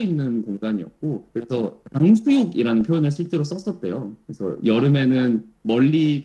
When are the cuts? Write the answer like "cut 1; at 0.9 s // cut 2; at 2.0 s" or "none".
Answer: none